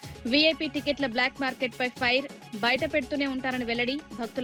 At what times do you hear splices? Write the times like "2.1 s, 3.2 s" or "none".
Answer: none